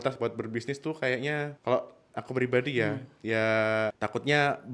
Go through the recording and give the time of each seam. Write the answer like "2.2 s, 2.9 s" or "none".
1.5 s, 4.0 s